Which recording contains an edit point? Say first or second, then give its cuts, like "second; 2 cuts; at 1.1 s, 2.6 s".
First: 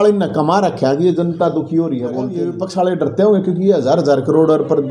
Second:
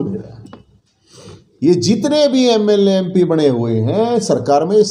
first; 1 cut; at 2.4 s